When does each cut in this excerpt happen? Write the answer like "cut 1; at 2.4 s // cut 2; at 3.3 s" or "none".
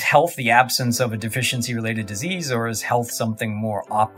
none